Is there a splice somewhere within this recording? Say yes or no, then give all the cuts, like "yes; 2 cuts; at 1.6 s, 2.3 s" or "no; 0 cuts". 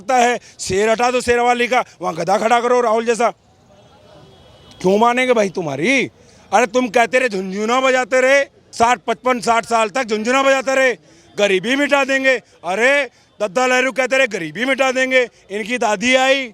no; 0 cuts